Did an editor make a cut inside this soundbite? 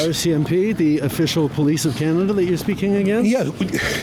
no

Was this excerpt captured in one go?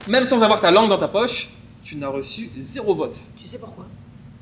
yes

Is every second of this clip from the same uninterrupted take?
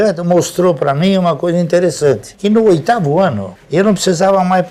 yes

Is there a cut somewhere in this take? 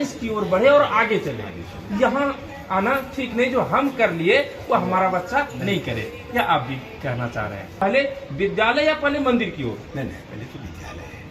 yes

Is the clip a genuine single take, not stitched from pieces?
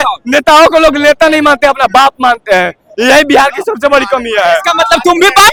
yes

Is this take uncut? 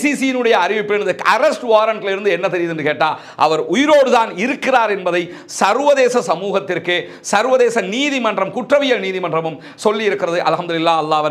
yes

